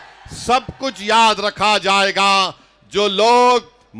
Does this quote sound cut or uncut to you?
uncut